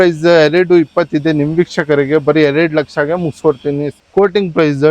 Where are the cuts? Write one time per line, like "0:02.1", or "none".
0:03.9